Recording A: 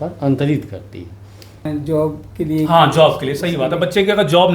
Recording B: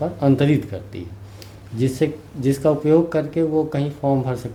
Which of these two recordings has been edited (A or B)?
A